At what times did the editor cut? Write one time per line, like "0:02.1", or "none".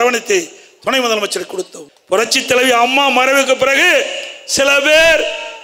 0:01.8